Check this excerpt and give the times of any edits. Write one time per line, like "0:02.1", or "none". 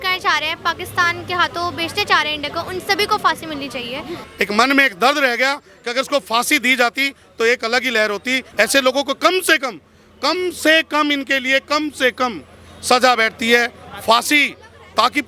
0:04.2
0:08.4